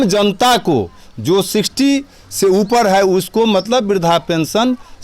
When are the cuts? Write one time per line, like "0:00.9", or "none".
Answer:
none